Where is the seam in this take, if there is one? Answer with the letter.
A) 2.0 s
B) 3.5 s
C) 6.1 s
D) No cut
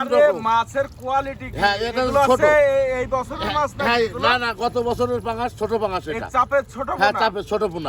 D